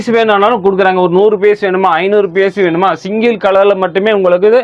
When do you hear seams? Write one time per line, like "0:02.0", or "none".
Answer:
none